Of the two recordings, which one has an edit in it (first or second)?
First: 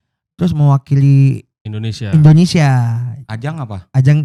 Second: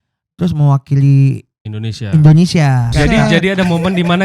second